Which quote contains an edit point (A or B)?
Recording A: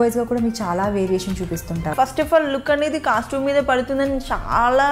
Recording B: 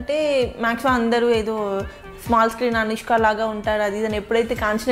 A